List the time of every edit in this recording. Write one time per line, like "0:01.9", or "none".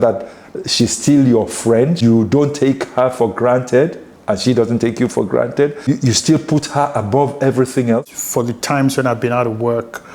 0:02.0
0:05.9
0:08.2